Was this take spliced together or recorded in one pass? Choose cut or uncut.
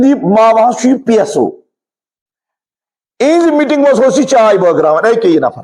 uncut